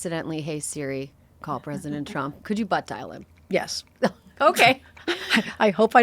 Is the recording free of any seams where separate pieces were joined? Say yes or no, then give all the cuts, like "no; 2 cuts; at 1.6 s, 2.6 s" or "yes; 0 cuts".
no; 1 cut; at 2.4 s